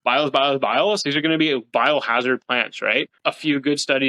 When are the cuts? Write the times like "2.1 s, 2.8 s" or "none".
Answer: 3.2 s